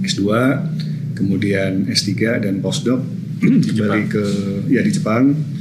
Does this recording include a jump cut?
no; 0 cuts

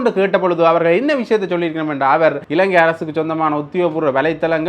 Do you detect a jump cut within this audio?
yes; 1 cut; at 2.4 s

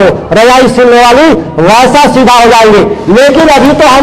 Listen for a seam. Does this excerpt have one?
no; 0 cuts

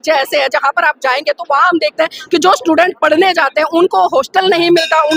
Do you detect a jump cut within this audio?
no; 0 cuts

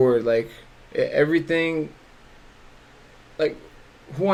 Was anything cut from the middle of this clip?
no; 0 cuts

